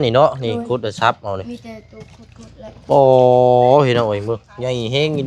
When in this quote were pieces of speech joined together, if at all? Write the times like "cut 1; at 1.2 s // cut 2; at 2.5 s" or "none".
none